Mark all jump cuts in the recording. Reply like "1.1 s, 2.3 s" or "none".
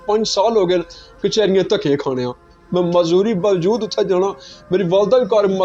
none